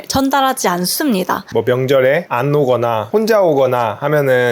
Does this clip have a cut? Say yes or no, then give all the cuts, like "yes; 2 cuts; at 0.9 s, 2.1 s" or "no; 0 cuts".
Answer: yes; 3 cuts; at 1.4 s, 2.3 s, 3.0 s